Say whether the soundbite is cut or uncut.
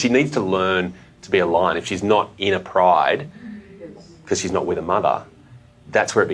uncut